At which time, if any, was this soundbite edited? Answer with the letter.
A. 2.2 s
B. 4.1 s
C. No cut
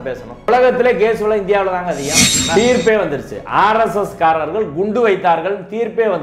A